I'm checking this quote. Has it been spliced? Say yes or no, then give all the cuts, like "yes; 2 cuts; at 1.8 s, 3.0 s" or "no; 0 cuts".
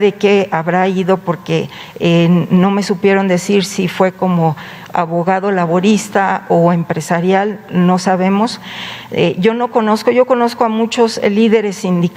no; 0 cuts